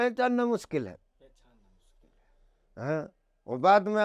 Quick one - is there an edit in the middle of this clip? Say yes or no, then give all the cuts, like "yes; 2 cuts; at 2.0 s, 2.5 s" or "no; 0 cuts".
no; 0 cuts